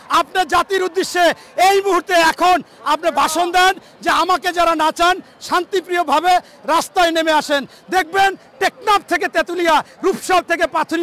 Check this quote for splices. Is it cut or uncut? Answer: uncut